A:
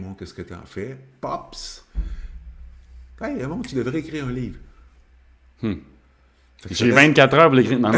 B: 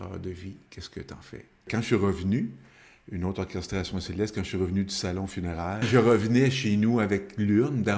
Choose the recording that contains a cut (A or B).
B